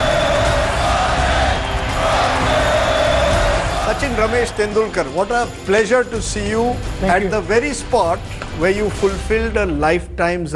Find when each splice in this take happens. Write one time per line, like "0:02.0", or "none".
none